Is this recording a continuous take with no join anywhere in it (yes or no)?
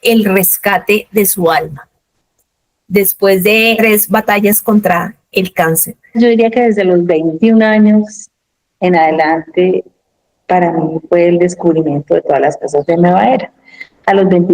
no